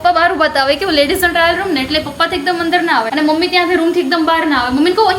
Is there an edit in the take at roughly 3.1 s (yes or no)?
yes